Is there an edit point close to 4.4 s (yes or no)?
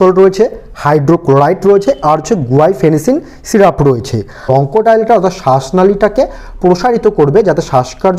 yes